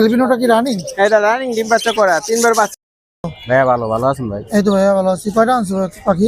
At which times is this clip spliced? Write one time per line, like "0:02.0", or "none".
0:02.7